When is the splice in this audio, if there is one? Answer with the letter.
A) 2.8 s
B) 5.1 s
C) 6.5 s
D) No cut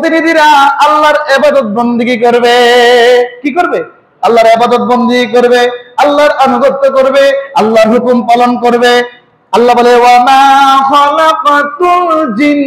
D